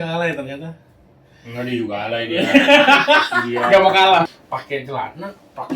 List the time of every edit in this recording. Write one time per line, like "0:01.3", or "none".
0:04.3